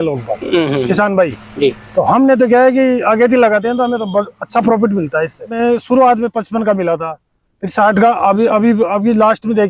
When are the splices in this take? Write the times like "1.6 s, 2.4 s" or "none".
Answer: 5.5 s

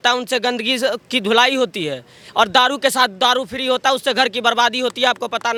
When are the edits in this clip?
none

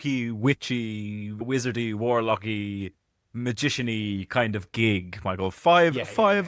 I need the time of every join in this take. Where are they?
none

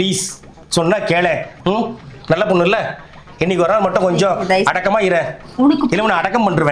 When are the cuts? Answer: none

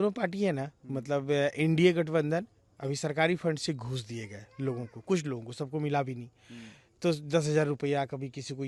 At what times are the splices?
none

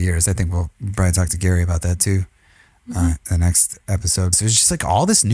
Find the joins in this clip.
4.3 s

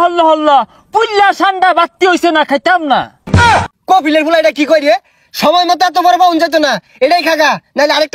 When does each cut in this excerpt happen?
3.4 s

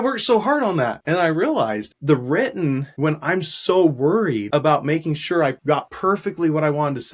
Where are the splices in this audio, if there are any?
1.0 s, 1.9 s, 2.9 s, 4.4 s, 5.7 s

